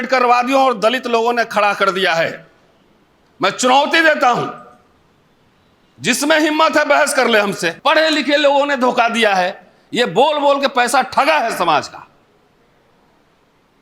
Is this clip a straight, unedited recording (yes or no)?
no